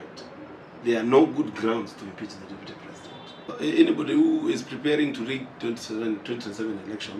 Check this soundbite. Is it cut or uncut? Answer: cut